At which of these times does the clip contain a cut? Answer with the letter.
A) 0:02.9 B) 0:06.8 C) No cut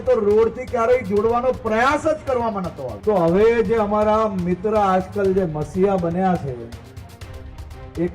A